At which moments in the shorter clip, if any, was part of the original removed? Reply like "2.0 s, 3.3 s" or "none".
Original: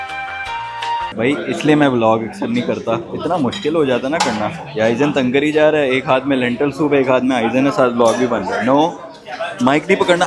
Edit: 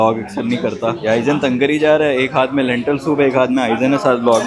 1.0 s

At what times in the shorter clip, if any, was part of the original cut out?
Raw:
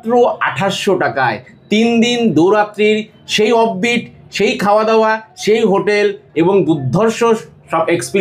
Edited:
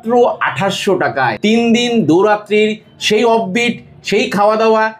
1.4 s

